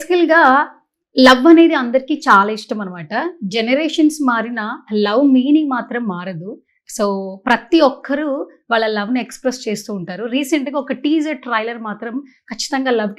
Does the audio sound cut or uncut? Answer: uncut